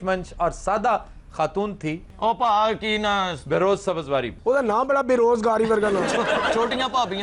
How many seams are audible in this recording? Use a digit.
1